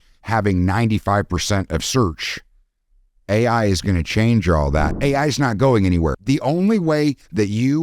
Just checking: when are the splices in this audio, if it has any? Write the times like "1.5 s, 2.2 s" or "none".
4.9 s